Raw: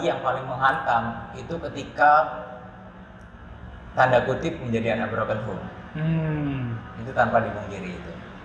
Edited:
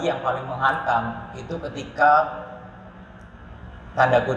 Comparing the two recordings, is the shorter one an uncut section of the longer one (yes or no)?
yes